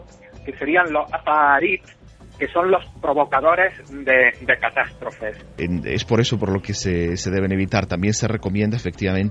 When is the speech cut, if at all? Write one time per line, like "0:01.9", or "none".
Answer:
0:05.6